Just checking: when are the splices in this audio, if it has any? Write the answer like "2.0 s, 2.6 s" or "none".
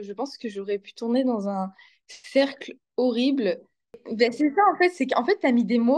4.0 s